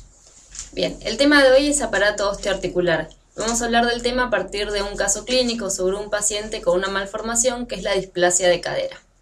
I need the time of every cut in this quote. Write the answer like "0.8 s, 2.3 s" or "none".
none